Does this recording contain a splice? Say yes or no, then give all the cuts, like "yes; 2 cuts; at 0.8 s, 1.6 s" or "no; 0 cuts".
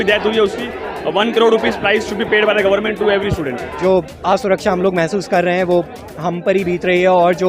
yes; 1 cut; at 3.7 s